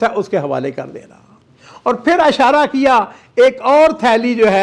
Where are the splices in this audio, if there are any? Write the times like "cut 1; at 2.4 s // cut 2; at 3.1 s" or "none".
none